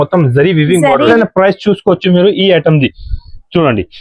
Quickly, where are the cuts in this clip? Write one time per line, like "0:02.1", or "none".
0:01.1